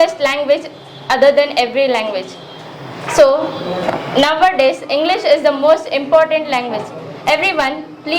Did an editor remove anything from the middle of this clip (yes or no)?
no